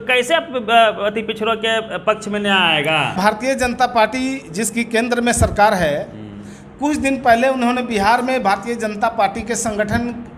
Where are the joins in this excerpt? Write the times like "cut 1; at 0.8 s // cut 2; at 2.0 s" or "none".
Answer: cut 1; at 3.2 s